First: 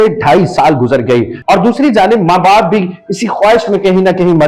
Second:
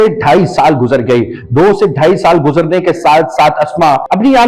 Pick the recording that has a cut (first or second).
first